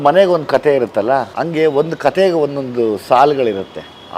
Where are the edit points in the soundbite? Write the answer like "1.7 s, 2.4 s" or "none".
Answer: 1.3 s